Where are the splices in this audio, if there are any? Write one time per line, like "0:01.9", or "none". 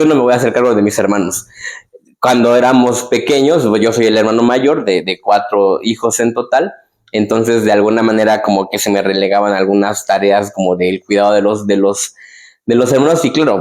none